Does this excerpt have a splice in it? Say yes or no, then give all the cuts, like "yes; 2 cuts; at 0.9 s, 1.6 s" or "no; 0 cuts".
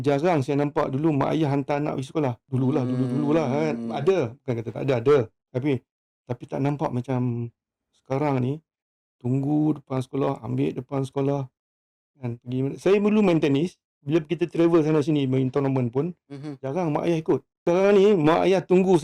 yes; 2 cuts; at 2.4 s, 17.5 s